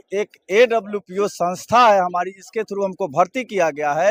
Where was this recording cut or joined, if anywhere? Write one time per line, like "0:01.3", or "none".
none